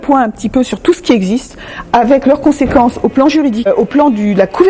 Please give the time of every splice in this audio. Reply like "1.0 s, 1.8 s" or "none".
3.7 s